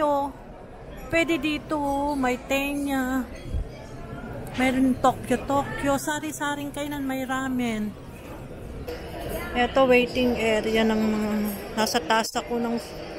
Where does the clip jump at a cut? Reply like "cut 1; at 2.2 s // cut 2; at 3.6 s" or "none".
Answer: cut 1; at 8.9 s